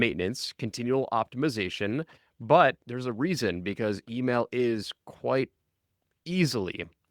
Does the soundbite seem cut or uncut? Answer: uncut